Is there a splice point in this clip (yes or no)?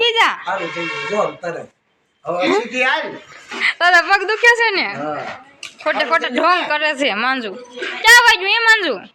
no